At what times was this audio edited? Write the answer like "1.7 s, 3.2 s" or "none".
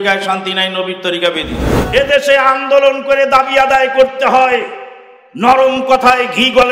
1.7 s